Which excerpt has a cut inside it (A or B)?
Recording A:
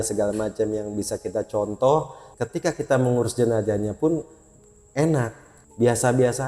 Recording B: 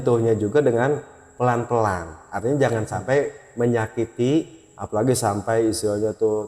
A